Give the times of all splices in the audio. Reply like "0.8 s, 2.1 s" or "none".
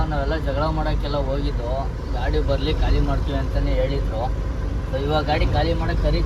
none